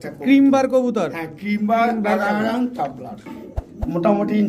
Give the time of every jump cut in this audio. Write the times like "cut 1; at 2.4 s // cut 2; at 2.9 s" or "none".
cut 1; at 3.3 s